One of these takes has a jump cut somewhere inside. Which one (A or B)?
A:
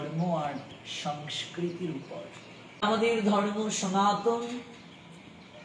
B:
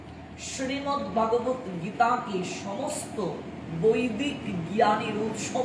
A